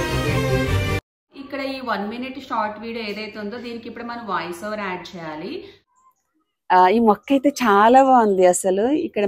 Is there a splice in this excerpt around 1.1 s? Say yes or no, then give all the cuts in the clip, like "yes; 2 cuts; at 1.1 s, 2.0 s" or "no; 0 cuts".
yes; 2 cuts; at 1.1 s, 6.0 s